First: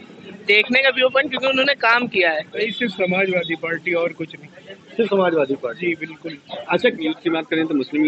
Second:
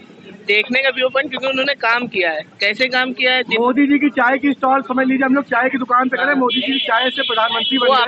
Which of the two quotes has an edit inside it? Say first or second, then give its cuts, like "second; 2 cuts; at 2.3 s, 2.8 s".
first; 2 cuts; at 2.5 s, 7.0 s